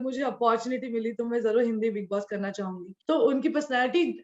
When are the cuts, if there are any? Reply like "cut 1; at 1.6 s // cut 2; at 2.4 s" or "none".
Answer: cut 1; at 2.9 s